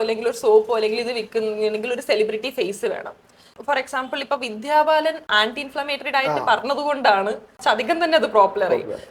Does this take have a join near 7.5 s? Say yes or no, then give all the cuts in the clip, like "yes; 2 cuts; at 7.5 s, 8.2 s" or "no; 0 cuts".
yes; 3 cuts; at 3.6 s, 5.3 s, 7.5 s